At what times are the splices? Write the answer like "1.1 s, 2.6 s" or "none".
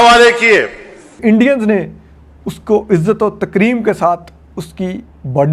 1.2 s